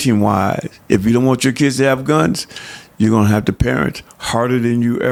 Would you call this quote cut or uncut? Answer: uncut